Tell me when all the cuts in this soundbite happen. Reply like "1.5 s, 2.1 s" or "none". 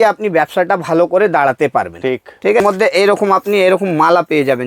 2.6 s